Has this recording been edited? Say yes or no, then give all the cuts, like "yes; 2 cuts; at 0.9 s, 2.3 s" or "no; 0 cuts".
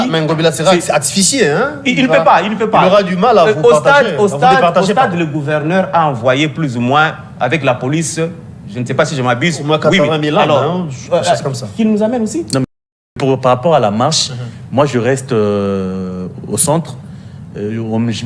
yes; 1 cut; at 12.6 s